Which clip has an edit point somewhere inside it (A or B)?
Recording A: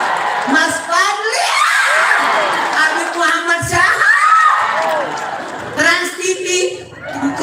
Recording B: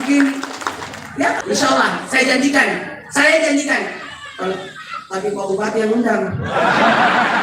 B